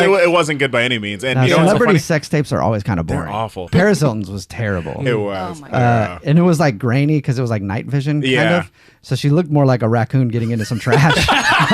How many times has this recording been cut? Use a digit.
1